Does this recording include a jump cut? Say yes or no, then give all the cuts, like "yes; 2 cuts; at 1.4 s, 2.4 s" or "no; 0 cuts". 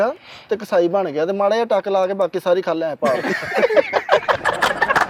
no; 0 cuts